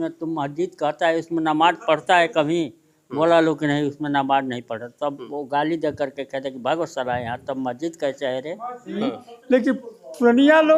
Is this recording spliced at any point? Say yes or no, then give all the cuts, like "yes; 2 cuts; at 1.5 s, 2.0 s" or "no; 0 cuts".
no; 0 cuts